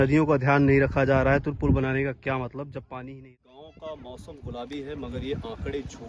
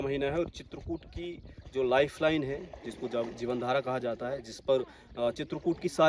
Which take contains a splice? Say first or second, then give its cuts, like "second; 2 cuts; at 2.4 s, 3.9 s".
first; 1 cut; at 3.7 s